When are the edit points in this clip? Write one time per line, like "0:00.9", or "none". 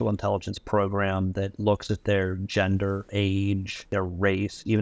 0:03.1
0:03.9